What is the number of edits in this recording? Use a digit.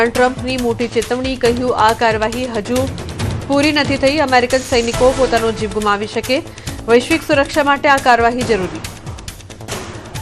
1